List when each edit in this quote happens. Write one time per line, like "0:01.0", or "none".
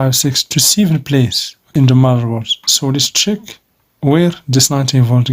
none